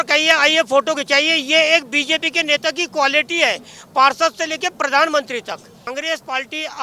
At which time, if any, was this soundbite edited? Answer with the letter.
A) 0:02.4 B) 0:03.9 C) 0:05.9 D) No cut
C